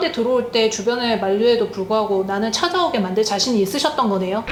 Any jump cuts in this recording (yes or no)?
no